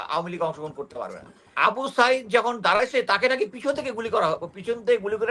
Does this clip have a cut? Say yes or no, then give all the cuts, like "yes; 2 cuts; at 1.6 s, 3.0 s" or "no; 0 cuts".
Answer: yes; 1 cut; at 1.5 s